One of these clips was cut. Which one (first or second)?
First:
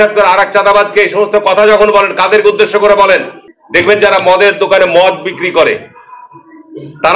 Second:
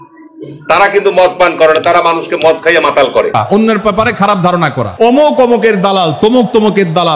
second